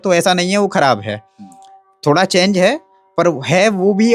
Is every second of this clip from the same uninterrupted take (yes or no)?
yes